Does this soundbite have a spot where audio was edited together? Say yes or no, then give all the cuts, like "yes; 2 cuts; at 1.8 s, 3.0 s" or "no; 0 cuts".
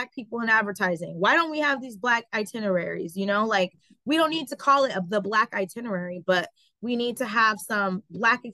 no; 0 cuts